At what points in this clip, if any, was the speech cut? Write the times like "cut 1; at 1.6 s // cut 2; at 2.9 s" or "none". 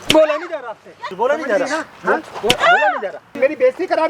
cut 1; at 1.1 s // cut 2; at 3.4 s